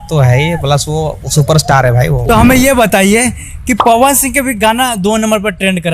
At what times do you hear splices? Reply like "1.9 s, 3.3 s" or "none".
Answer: 2.2 s